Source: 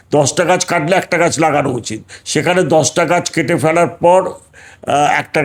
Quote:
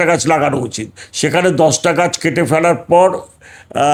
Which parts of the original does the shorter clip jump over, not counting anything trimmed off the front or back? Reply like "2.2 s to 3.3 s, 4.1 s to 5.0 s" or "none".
none